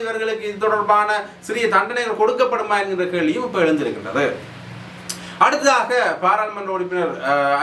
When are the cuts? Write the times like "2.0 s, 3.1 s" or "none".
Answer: none

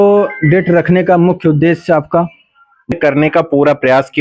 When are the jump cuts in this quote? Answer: 2.9 s

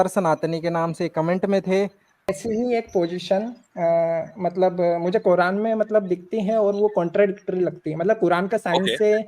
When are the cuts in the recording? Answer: 2.4 s

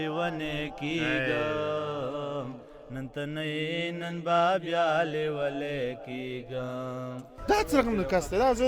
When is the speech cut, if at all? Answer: 7.3 s

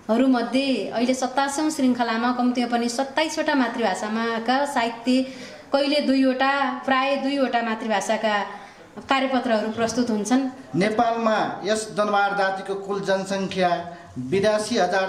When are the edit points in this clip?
10.6 s

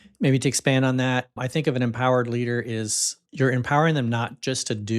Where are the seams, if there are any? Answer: 3.2 s

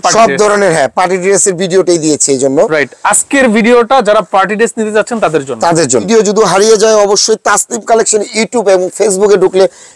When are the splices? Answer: 6.1 s

